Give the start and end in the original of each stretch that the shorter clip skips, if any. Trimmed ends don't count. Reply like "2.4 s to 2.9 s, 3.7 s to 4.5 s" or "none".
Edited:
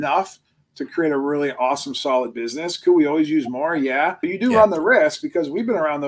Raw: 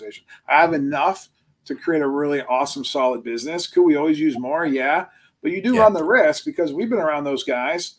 5.1 s to 5.5 s